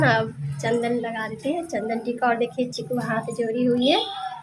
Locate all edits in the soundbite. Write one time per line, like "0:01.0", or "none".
none